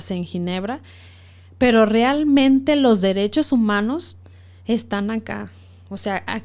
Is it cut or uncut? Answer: uncut